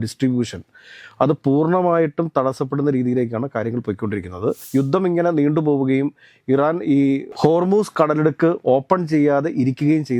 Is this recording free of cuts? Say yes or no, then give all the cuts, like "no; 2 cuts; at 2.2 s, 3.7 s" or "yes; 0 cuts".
no; 1 cut; at 4.6 s